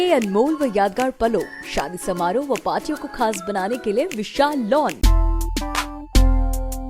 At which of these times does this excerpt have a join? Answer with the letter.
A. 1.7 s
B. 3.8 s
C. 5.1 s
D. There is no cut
C